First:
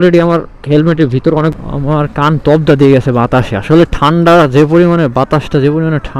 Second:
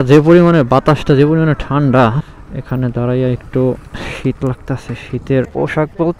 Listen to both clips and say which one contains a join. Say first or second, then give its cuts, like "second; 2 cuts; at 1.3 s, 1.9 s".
first; 1 cut; at 1.5 s